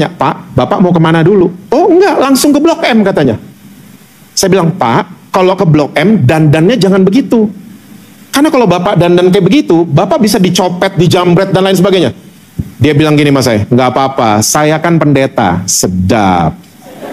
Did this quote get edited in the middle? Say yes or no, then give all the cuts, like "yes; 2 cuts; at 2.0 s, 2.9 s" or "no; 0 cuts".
no; 0 cuts